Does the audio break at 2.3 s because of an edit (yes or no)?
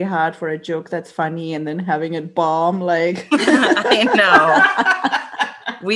no